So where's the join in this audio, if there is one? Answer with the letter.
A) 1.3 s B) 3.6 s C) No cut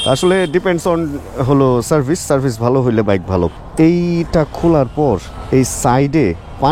B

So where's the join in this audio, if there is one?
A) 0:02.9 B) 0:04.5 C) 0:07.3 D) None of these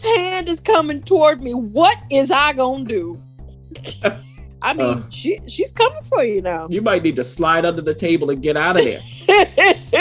B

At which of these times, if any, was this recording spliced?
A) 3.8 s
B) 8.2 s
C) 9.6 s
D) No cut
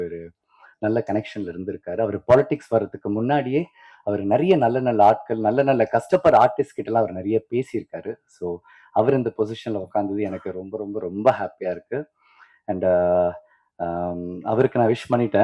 D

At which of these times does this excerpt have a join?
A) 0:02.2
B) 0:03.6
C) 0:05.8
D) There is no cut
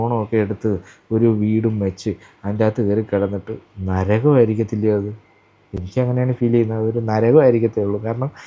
D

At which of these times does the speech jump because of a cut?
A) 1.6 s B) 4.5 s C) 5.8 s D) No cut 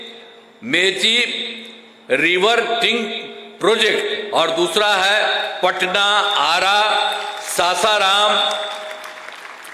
D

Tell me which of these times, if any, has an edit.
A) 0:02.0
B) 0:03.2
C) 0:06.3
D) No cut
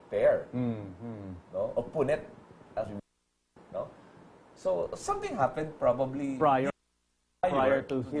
D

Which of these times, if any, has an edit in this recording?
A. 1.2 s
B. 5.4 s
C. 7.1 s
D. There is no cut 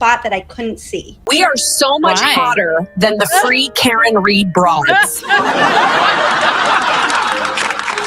A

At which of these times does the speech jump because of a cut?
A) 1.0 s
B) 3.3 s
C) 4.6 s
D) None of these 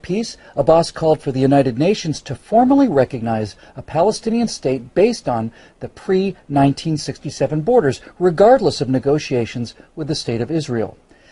C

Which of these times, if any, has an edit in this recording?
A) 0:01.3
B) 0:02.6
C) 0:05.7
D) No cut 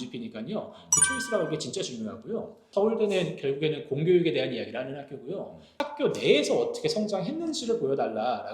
B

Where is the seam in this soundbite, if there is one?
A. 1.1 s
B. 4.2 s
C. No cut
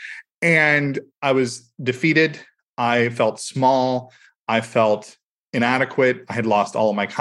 A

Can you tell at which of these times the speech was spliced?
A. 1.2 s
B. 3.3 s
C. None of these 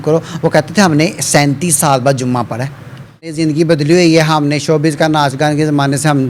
B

